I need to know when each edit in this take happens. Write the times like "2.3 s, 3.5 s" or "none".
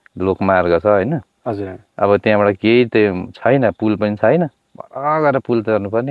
none